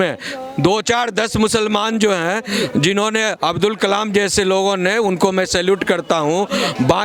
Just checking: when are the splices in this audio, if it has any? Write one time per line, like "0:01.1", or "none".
none